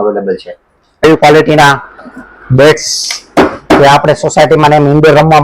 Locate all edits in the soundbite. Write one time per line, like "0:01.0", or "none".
0:01.0